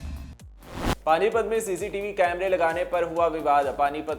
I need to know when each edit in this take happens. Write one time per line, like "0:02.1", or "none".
0:01.0